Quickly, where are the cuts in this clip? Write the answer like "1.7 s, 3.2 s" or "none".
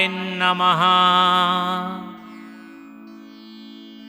1.8 s